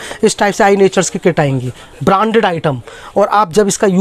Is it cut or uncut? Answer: uncut